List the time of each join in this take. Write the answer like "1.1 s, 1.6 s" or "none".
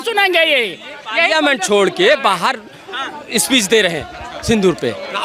none